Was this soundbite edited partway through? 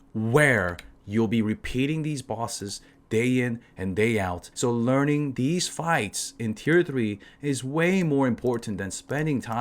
yes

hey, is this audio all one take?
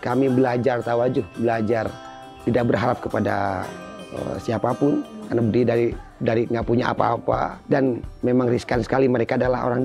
no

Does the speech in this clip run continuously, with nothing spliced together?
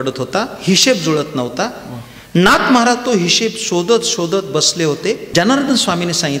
no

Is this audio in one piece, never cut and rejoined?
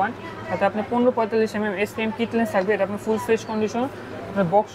yes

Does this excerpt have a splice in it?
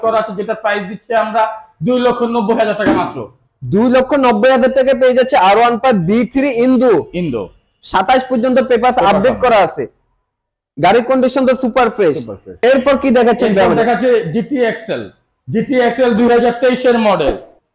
no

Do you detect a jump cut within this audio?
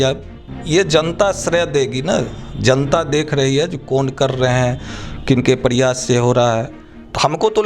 yes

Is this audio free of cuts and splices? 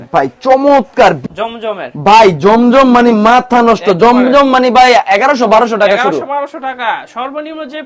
no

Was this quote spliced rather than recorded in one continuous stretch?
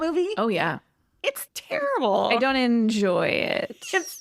yes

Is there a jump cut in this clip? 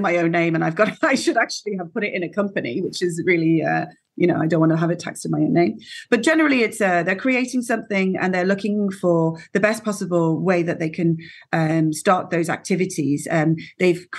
no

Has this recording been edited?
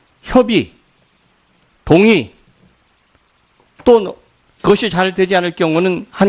no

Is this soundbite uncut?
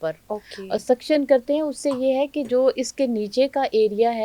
yes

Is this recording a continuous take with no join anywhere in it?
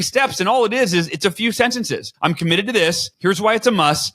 no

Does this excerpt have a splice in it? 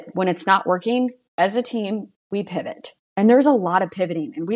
yes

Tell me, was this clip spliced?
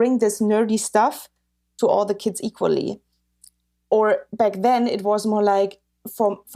no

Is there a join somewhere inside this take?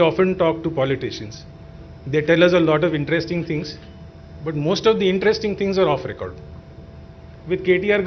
no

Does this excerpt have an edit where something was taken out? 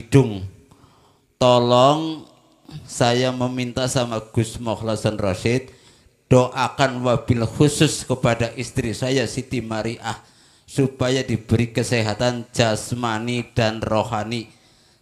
no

